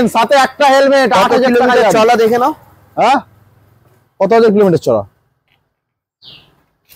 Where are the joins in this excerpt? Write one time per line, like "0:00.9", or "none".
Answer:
none